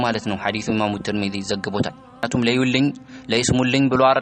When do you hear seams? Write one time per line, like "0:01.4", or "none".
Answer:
0:02.3